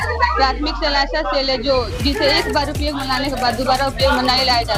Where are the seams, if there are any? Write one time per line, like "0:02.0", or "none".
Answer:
none